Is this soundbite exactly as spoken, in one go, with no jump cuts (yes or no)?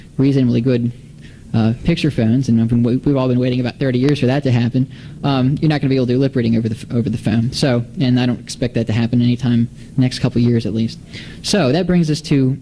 no